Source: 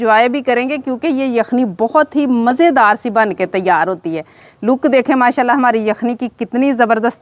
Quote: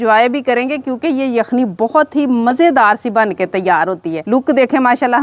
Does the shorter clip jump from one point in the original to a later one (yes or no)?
yes